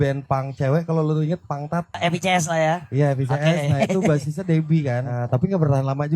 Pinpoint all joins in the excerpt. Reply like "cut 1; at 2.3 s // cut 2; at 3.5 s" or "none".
cut 1; at 2.0 s // cut 2; at 5.1 s